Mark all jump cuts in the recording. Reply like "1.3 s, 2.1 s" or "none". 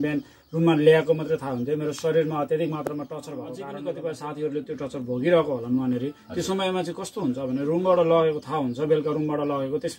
3.5 s